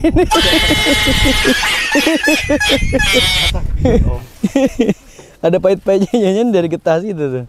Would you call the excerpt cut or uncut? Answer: uncut